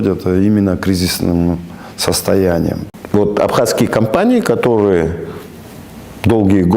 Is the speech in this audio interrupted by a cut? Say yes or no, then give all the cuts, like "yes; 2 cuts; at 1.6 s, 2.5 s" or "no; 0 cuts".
yes; 1 cut; at 2.8 s